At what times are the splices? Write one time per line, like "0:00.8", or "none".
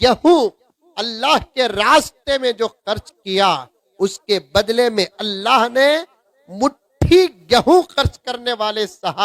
none